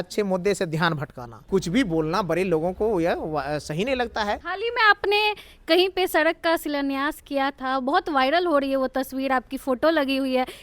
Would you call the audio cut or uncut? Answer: cut